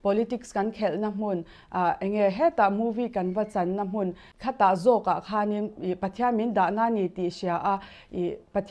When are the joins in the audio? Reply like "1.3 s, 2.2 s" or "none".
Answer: 4.3 s

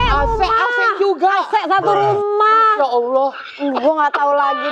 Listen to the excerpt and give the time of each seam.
none

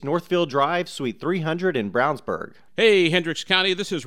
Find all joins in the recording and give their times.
2.6 s

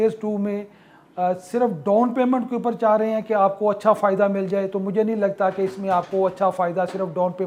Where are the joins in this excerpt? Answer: none

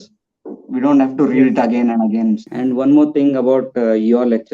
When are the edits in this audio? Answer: 2.5 s

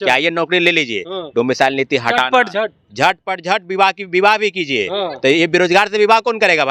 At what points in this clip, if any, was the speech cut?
none

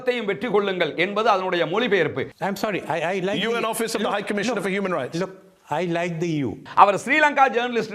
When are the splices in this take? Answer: 2.3 s, 6.7 s

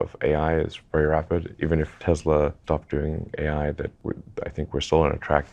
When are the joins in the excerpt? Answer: none

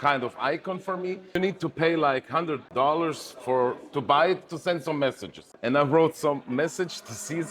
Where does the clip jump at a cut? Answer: 1.3 s

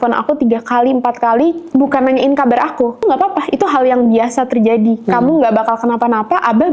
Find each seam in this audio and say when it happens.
3.0 s

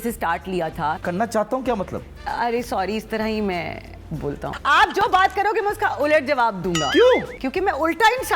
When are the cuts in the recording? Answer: 1.0 s, 4.4 s, 7.4 s

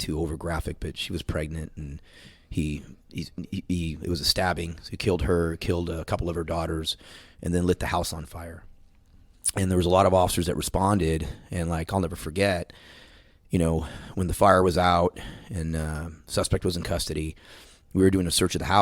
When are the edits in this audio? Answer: none

